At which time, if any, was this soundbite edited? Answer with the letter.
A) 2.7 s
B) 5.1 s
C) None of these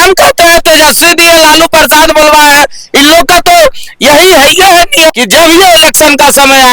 B